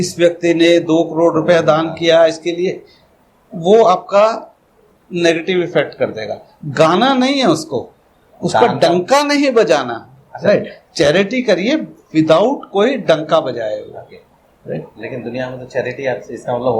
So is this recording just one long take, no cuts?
yes; 0 cuts

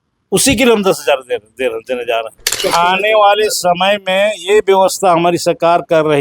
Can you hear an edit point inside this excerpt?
yes; 1 cut; at 2.6 s

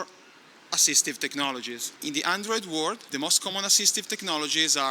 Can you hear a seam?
yes; 2 cuts; at 1.8 s, 3.1 s

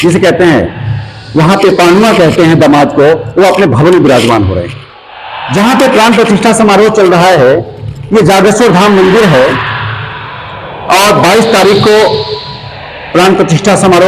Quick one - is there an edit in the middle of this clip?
no; 0 cuts

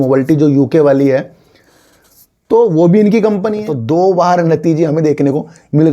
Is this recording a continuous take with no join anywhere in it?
no; 1 cut; at 3.7 s

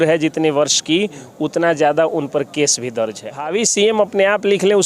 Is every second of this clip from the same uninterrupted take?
no; 1 cut; at 3.4 s

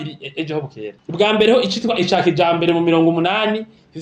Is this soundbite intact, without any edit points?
no; 1 cut; at 0.9 s

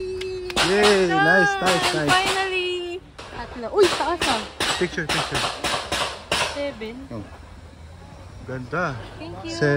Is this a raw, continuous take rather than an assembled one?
yes; 0 cuts

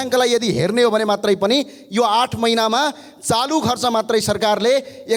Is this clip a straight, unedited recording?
yes; 0 cuts

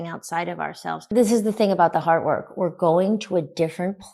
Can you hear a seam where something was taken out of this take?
yes; 1 cut; at 1.1 s

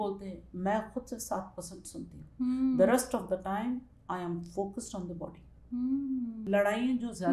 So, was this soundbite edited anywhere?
yes; 1 cut; at 6.4 s

